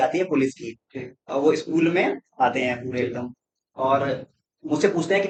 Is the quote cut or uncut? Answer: uncut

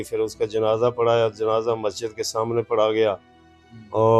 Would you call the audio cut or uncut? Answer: uncut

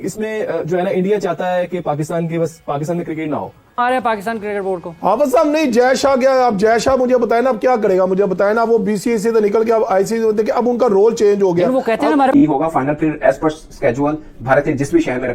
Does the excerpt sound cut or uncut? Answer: cut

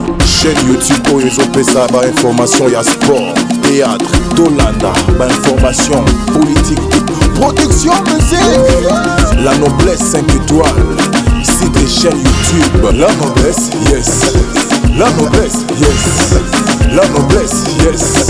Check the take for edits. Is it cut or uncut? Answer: uncut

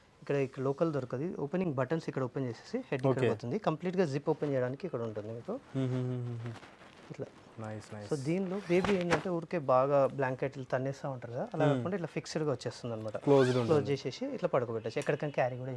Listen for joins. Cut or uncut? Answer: uncut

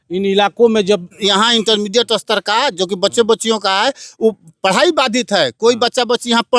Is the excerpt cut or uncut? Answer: cut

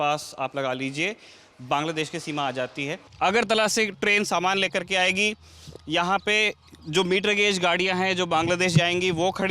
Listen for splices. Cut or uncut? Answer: cut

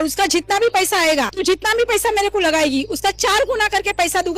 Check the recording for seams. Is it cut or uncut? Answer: cut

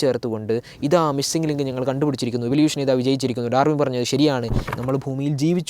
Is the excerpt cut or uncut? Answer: cut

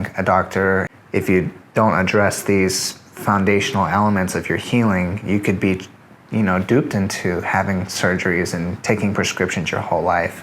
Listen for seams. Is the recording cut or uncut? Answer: cut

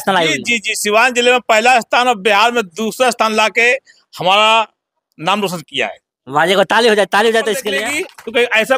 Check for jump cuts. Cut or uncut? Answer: cut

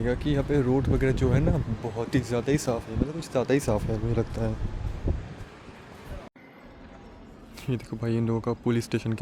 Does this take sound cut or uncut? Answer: cut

